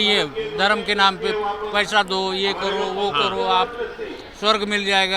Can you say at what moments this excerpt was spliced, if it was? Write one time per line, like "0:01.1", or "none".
none